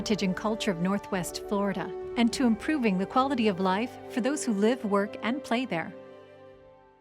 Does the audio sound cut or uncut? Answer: cut